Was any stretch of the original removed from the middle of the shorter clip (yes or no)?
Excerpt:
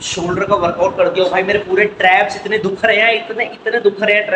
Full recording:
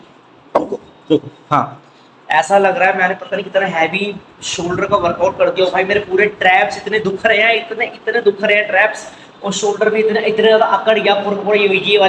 no